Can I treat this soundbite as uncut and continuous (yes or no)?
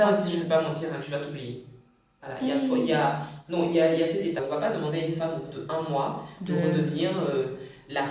no